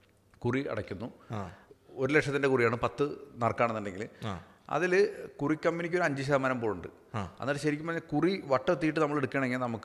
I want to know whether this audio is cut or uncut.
cut